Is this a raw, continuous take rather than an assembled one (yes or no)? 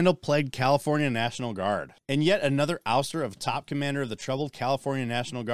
no